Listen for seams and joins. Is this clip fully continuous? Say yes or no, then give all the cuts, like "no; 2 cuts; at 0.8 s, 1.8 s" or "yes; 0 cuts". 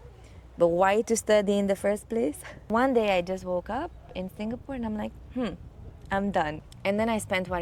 no; 2 cuts; at 2.7 s, 6.7 s